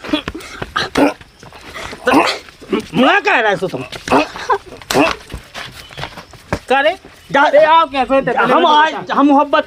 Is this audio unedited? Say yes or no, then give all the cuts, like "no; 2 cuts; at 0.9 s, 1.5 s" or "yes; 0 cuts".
yes; 0 cuts